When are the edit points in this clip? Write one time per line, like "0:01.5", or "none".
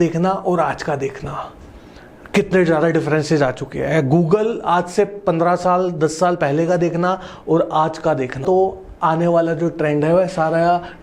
0:08.4